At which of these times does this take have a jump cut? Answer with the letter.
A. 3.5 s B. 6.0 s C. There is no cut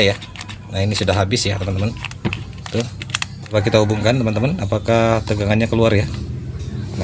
A